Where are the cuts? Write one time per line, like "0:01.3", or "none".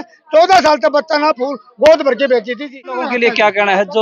0:03.1